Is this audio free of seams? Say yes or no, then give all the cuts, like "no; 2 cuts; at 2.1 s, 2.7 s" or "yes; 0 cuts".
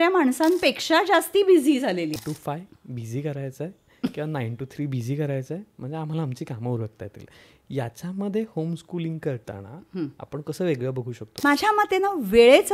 no; 2 cuts; at 2.2 s, 11.3 s